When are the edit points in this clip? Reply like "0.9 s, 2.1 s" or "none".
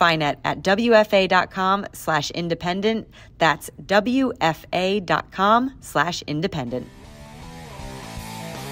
7.0 s